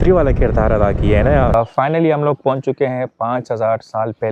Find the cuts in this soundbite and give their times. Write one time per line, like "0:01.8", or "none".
0:01.5

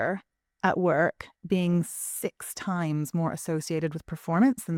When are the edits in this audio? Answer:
none

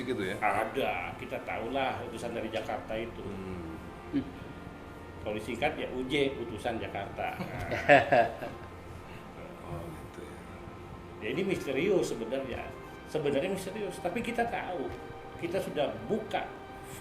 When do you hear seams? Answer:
none

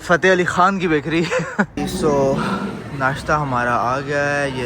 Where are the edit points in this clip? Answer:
0:01.8

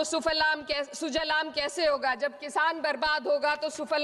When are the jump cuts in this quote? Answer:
none

